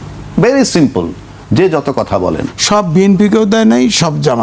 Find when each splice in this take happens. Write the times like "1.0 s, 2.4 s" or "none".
2.5 s